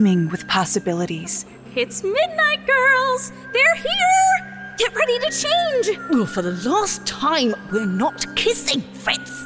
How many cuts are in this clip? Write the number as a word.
zero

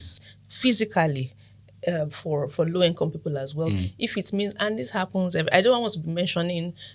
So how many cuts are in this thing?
zero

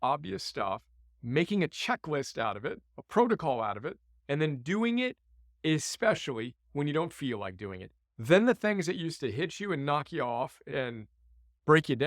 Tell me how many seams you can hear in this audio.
one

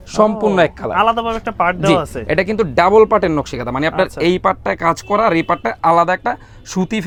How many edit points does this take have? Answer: zero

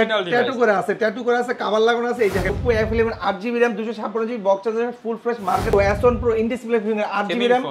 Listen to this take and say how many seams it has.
two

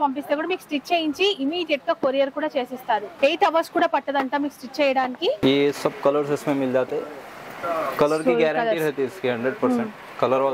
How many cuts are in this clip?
two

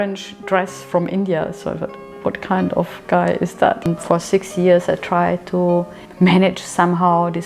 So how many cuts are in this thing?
one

